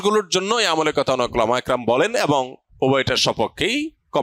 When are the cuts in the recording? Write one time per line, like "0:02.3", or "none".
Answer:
0:02.6